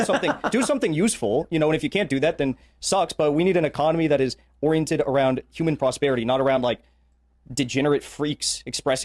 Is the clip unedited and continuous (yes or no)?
yes